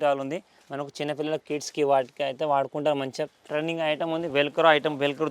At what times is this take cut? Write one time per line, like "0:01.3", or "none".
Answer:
0:03.4